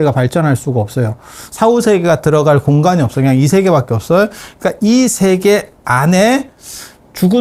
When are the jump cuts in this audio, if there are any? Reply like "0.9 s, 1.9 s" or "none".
none